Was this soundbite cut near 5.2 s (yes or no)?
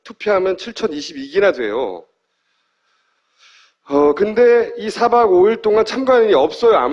yes